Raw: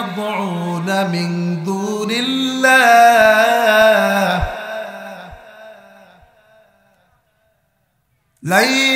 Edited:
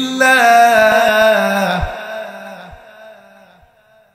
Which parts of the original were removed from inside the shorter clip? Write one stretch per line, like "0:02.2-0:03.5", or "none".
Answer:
0:03.4-0:03.6